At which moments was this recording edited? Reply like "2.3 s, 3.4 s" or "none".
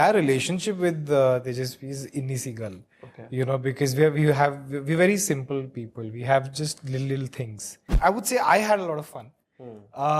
7.8 s